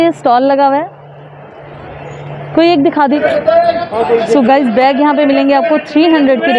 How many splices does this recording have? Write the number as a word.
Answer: one